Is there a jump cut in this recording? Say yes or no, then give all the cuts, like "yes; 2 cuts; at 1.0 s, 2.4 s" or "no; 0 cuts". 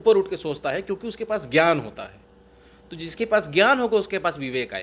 no; 0 cuts